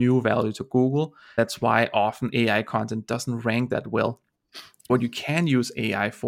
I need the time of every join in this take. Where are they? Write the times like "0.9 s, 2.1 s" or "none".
1.2 s, 4.9 s